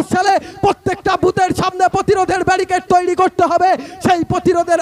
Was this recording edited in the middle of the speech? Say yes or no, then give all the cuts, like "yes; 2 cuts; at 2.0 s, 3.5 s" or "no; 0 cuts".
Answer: no; 0 cuts